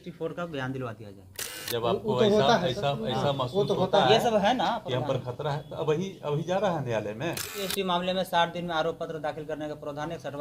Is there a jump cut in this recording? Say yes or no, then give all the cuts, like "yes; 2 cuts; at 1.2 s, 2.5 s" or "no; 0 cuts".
yes; 2 cuts; at 1.6 s, 7.7 s